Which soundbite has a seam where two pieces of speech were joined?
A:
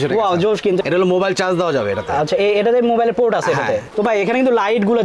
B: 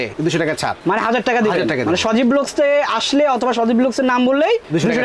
A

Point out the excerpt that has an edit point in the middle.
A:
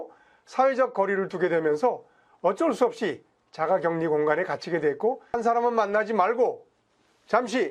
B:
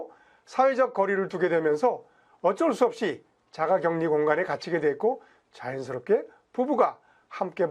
A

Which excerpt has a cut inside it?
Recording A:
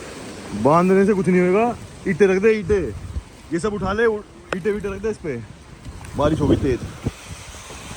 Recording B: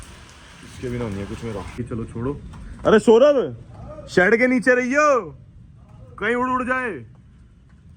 B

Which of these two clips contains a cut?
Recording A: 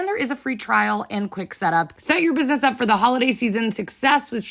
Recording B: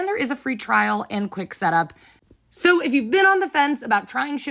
A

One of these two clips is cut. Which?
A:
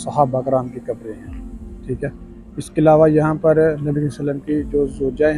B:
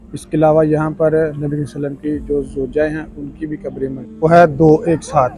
B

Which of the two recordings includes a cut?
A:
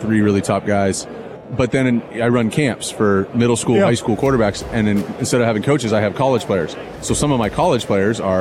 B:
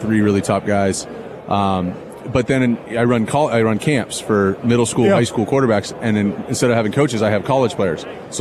A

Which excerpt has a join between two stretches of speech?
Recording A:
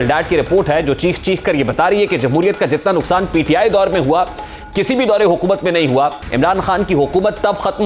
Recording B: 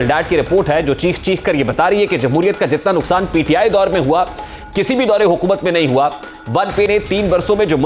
A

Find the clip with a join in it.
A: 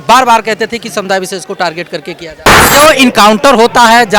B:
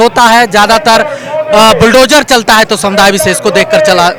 A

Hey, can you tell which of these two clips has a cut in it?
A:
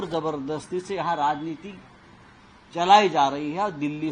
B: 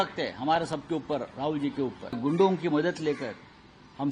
B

